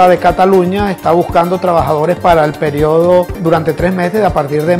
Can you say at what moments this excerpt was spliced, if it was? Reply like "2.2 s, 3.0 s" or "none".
none